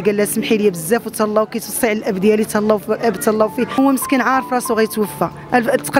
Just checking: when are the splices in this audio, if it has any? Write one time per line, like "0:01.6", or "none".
0:03.8